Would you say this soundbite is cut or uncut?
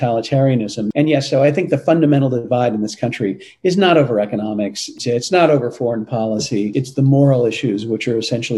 cut